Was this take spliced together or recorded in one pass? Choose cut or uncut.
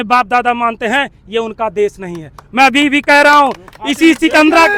uncut